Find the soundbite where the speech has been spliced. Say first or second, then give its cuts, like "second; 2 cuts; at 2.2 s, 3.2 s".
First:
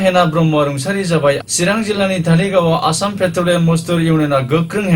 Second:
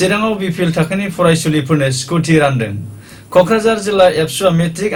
first; 1 cut; at 1.4 s